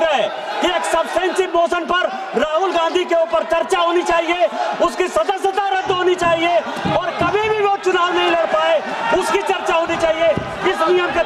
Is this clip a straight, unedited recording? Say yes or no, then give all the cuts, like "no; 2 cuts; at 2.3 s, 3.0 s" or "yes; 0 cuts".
yes; 0 cuts